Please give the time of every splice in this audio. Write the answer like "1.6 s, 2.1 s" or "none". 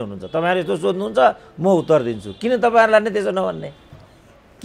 none